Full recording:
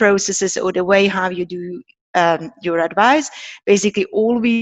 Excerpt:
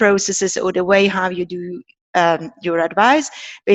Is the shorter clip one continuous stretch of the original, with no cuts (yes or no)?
yes